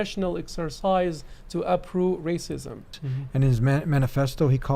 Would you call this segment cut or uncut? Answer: cut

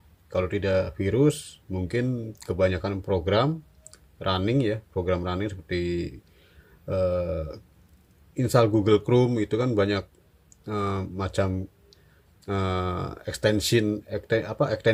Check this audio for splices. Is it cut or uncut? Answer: uncut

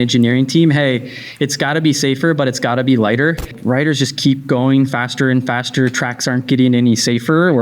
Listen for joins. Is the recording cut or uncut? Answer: cut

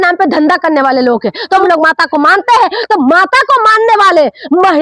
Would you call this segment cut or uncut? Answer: cut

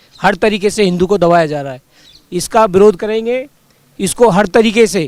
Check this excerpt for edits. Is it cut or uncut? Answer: uncut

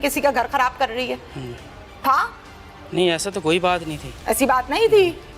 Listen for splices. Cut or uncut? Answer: uncut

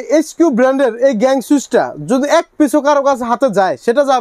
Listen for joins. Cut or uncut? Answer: uncut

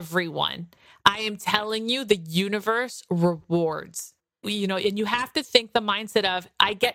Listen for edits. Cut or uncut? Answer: cut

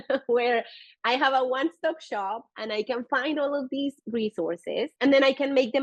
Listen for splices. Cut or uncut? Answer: cut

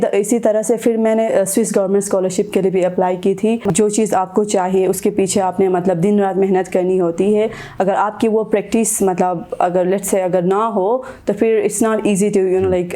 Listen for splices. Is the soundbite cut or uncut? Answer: cut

